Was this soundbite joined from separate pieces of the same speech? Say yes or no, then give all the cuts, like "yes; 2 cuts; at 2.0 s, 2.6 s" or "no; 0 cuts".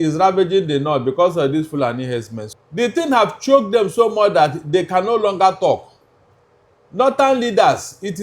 yes; 1 cut; at 2.4 s